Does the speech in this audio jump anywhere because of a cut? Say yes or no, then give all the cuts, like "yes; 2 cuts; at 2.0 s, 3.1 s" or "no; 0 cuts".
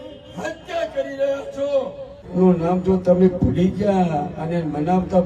yes; 1 cut; at 2.2 s